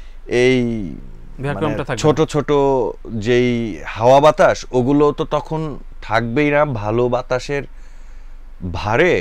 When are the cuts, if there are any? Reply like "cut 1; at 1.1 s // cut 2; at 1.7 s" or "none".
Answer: none

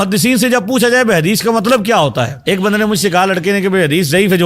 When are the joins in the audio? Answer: cut 1; at 2.3 s

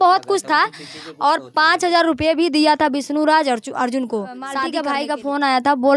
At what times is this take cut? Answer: cut 1; at 4.7 s

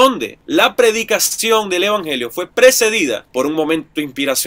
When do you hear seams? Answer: none

